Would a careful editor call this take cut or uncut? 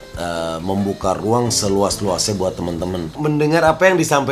cut